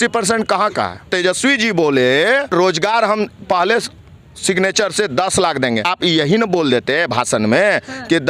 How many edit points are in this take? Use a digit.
3